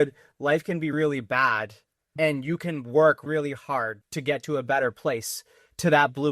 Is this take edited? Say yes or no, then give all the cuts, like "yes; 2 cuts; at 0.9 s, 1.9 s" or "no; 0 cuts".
yes; 1 cut; at 4.0 s